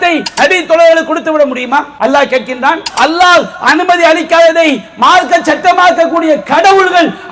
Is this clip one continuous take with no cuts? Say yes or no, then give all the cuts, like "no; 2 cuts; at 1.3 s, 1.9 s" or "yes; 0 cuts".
no; 2 cuts; at 1.9 s, 2.9 s